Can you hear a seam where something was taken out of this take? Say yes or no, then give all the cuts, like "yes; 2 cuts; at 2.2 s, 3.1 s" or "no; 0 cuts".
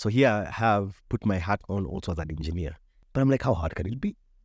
no; 0 cuts